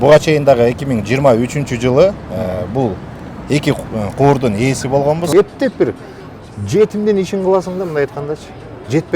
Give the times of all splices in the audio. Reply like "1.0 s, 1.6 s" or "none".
5.3 s